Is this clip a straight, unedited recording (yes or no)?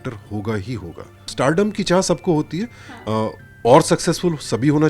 no